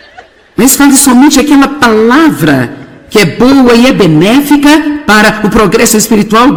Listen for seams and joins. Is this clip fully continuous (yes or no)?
yes